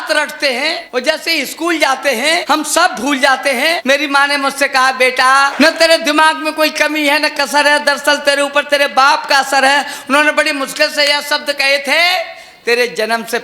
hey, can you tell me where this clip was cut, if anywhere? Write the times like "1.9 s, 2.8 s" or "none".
0.8 s, 2.4 s, 3.8 s, 5.5 s